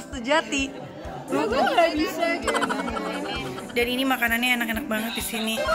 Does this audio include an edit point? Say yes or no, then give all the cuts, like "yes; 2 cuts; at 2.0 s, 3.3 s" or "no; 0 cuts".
yes; 1 cut; at 3.4 s